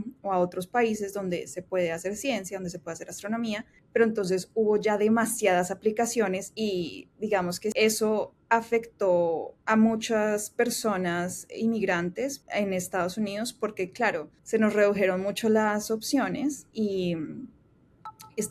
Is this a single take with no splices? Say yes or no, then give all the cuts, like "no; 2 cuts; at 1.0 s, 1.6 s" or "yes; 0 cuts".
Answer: no; 7 cuts; at 3.7 s, 6.5 s, 7.7 s, 9.5 s, 12.4 s, 14.3 s, 16.6 s